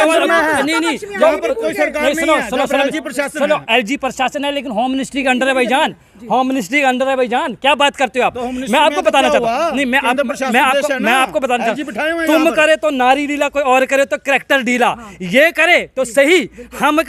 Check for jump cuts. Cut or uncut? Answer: uncut